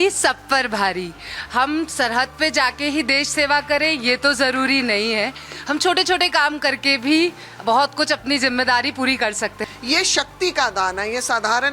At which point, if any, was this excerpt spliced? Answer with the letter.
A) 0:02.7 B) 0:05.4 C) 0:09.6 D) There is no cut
C